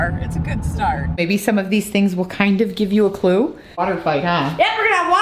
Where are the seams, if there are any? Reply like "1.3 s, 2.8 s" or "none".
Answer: 1.2 s, 3.8 s